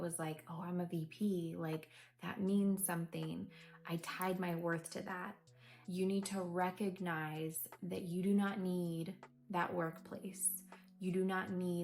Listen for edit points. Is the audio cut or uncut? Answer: cut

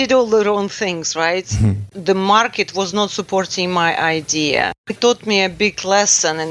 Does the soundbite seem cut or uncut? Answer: cut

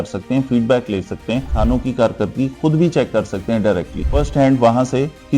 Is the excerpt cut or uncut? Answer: cut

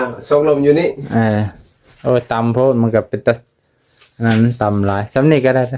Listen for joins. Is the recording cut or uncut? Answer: uncut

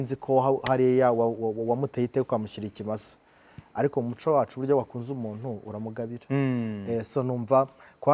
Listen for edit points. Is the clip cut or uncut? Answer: uncut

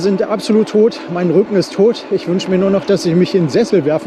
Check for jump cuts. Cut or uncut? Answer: uncut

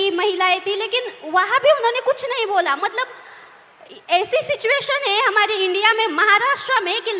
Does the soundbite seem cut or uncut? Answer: uncut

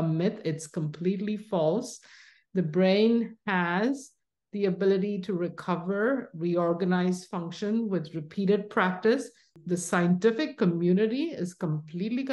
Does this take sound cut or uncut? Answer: cut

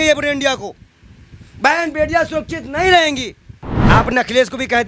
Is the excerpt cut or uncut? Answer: cut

